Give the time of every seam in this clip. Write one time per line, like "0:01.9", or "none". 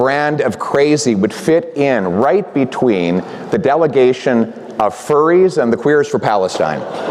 none

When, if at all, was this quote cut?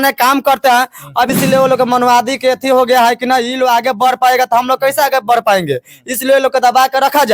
0:01.3

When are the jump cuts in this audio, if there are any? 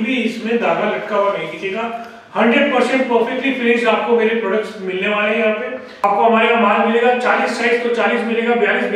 0:06.0

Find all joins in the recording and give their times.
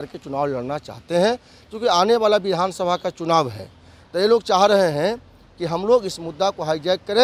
none

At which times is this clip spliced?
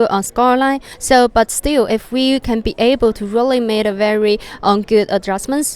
0:00.9

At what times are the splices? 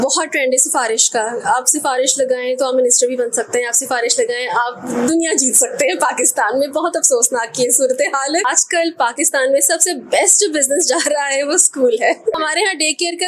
0:08.3
0:12.3

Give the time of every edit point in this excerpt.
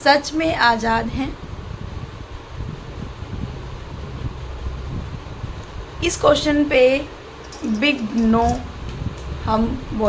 none

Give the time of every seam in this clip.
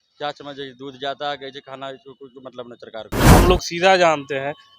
0:03.2

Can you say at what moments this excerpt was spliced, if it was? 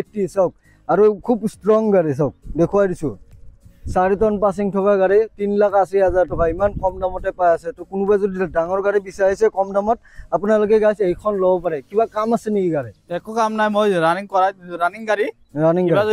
none

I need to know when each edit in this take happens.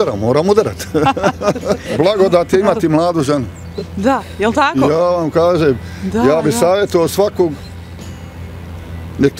0:01.9

